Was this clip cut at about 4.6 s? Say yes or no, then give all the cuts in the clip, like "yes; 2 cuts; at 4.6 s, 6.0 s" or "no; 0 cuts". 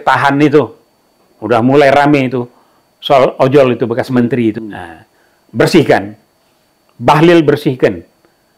yes; 1 cut; at 4.6 s